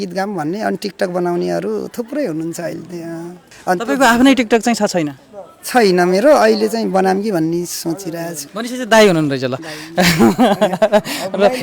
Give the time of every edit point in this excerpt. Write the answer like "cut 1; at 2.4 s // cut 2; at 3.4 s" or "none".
cut 1; at 3.5 s // cut 2; at 8.4 s